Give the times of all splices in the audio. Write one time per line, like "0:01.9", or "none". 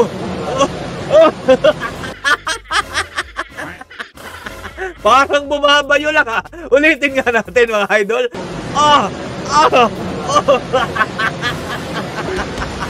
none